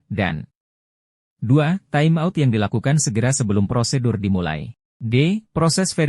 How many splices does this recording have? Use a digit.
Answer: 1